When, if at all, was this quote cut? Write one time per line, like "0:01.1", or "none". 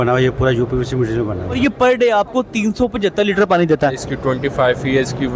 0:01.6
0:04.0